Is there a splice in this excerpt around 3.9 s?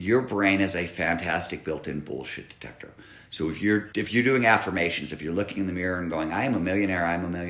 yes; 1 cut; at 3.9 s

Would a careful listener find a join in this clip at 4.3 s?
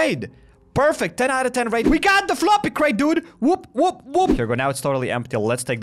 yes; 2 cuts; at 1.8 s, 4.3 s

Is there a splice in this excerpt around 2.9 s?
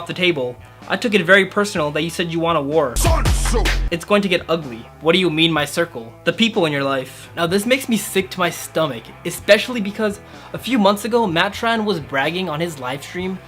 no; 0 cuts

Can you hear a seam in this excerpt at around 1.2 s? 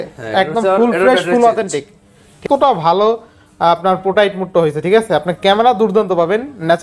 no; 1 cut; at 2.4 s

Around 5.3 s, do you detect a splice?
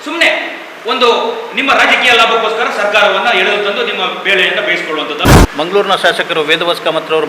yes; 1 cut; at 5.3 s

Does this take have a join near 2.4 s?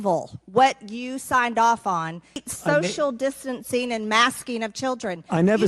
yes; 1 cut; at 2.4 s

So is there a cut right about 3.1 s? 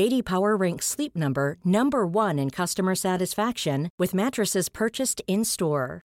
no; 0 cuts

